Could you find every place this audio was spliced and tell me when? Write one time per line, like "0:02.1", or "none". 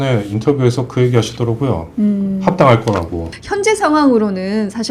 0:03.4

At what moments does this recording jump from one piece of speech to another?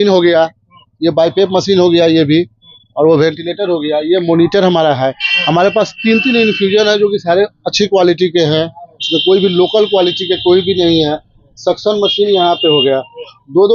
none

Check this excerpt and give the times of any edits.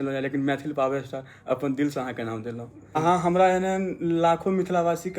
0:02.9

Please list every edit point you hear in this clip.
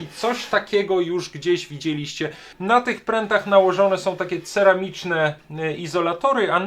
0:02.4

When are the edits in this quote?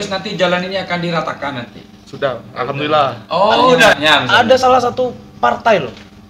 0:03.9

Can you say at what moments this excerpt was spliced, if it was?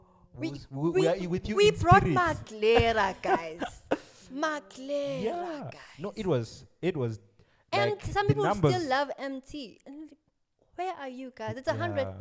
none

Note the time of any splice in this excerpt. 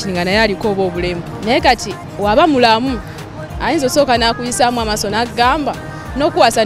0:01.3

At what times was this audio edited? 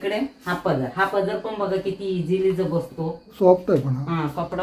0:03.4

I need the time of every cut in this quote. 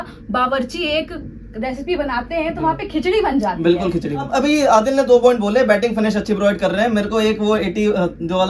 0:04.3

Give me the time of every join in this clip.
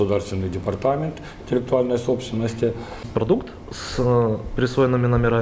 0:03.1

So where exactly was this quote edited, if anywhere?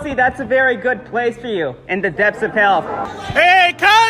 0:03.0

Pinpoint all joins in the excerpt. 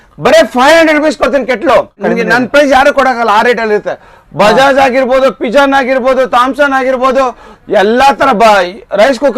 0:02.0

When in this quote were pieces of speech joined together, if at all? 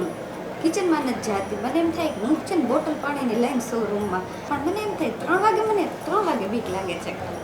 0:04.5

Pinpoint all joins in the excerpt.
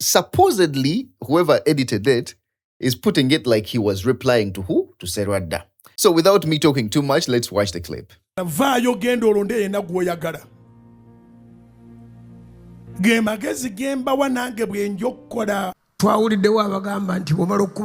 none

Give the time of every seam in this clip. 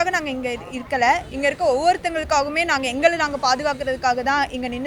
none

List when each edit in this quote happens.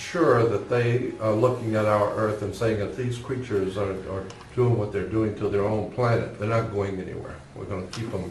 0:06.3

